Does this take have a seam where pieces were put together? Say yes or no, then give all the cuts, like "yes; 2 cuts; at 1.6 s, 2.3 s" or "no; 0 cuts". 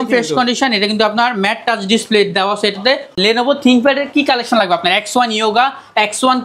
yes; 1 cut; at 3.1 s